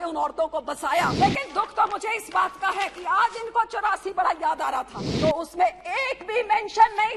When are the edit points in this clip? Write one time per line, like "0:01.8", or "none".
0:01.1
0:05.0